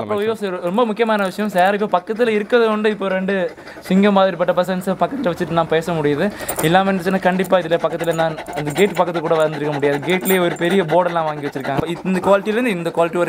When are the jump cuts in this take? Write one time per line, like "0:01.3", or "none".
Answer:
0:11.8